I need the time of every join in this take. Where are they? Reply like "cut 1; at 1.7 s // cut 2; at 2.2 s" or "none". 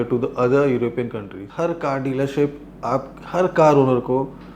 cut 1; at 1.4 s